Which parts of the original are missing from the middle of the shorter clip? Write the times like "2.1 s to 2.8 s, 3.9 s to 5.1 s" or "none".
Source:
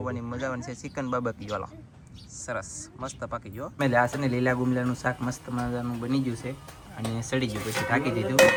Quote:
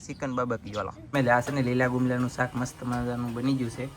1.8 s to 3.7 s